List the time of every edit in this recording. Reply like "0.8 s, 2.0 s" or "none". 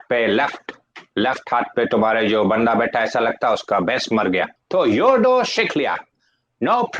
4.6 s